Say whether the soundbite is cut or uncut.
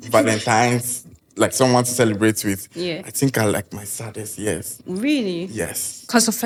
uncut